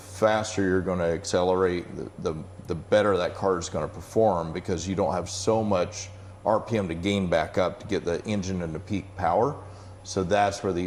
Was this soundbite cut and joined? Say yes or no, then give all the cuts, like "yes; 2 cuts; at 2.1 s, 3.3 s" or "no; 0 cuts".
no; 0 cuts